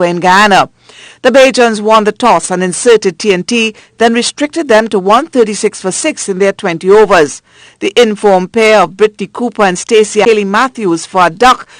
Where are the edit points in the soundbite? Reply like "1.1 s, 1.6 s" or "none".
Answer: 10.2 s